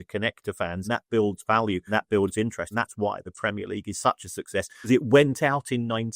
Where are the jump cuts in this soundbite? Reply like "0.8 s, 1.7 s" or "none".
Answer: 0.9 s, 1.8 s, 2.7 s, 4.9 s